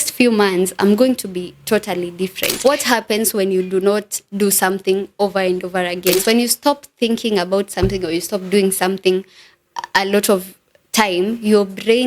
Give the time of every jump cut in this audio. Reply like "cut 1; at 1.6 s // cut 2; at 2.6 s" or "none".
cut 1; at 2.5 s // cut 2; at 6.2 s